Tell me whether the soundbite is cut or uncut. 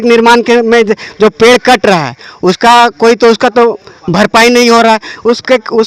uncut